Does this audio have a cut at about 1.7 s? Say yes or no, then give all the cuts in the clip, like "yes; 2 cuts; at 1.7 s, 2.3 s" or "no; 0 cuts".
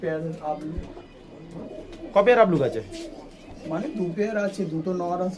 yes; 1 cut; at 1.7 s